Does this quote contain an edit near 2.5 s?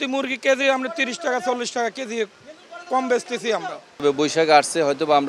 no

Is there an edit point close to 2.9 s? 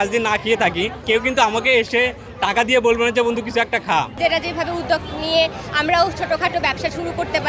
no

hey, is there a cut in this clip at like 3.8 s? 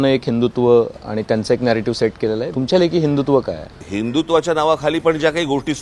yes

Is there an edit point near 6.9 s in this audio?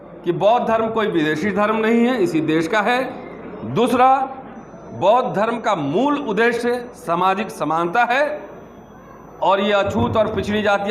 no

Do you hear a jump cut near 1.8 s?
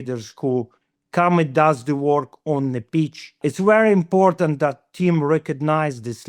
no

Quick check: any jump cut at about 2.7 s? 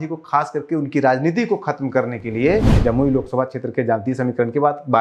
yes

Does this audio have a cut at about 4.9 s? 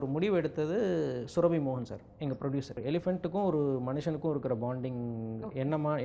no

